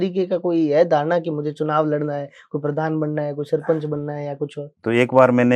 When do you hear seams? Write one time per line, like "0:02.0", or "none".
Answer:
0:04.7